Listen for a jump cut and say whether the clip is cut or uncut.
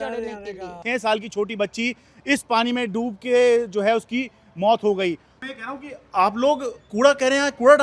cut